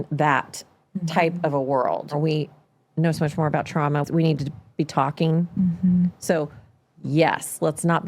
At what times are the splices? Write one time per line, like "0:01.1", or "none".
0:02.1
0:04.0